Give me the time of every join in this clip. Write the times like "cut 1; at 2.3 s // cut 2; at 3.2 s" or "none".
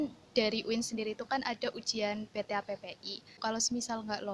cut 1; at 3.4 s